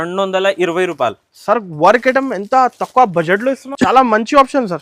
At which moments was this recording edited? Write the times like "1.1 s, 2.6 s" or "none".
3.7 s